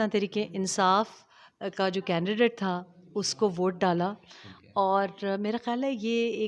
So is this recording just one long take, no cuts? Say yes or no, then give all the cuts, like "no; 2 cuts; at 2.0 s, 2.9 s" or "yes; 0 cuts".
yes; 0 cuts